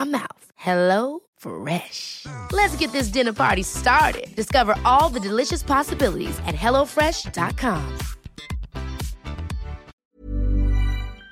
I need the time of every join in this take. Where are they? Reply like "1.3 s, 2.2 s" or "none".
9.9 s